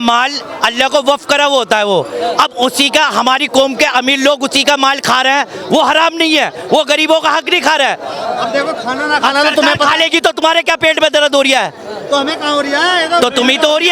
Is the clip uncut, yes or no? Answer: yes